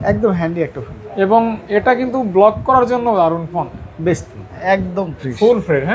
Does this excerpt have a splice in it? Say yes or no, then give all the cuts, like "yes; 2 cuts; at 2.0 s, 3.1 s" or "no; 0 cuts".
yes; 1 cut; at 4.5 s